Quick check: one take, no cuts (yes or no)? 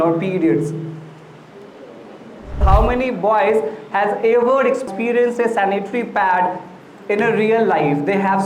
no